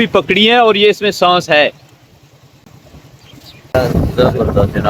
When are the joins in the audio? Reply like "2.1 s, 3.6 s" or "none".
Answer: none